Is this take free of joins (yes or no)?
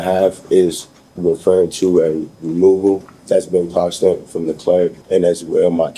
no